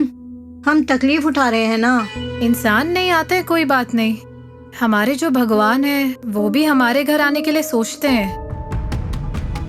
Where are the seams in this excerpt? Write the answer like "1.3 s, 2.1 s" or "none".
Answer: 2.2 s